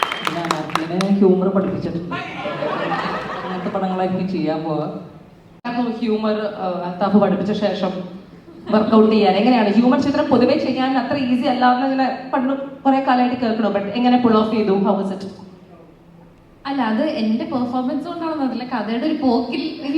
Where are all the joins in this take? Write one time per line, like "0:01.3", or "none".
0:05.7